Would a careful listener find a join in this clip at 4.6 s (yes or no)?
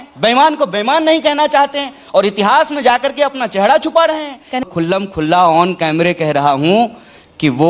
yes